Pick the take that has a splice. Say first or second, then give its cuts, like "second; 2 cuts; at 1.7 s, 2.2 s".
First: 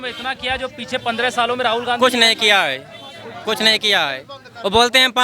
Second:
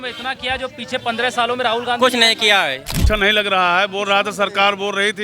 second; 1 cut; at 3.0 s